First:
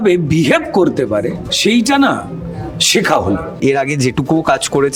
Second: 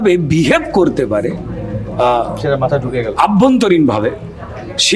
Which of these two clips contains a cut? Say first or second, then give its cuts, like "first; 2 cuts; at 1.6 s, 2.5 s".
first; 2 cuts; at 1.5 s, 3.5 s